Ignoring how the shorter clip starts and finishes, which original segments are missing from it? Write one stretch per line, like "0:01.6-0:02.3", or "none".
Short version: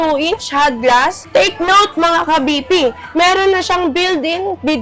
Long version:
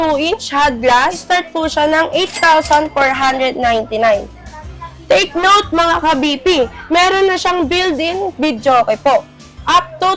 0:01.2-0:04.9